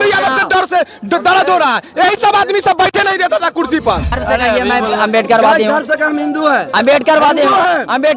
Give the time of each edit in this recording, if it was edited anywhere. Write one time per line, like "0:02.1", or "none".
0:04.1